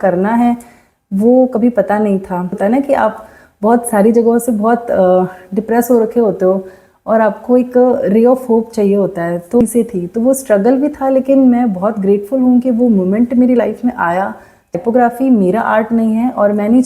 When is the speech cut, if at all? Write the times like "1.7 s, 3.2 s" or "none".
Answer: 2.6 s, 9.6 s, 14.8 s